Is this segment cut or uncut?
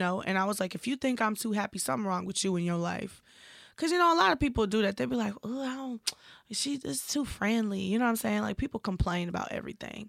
uncut